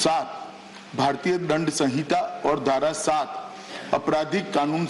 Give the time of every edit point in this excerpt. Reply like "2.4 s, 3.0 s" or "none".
1.8 s